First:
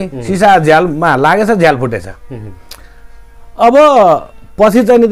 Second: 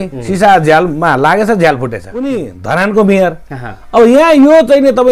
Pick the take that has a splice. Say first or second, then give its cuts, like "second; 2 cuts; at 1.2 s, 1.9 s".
second; 1 cut; at 2.2 s